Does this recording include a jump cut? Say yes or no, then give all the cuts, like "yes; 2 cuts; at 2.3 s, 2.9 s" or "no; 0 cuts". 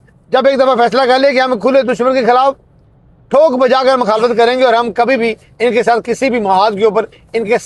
no; 0 cuts